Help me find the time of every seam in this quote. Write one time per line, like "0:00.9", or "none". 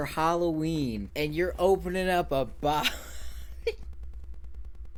none